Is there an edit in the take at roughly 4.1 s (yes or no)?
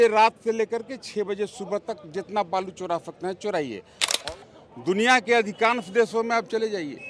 yes